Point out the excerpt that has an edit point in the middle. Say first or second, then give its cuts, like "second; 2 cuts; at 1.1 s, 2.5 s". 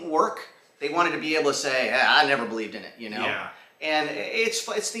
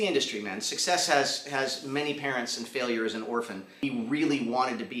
second; 1 cut; at 3.8 s